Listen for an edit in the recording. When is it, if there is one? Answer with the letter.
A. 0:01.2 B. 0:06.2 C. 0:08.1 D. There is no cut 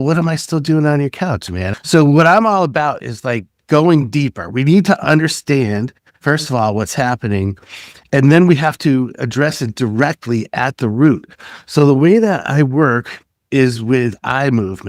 D